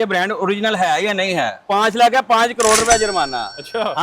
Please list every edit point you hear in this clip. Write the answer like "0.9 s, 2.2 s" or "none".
1.6 s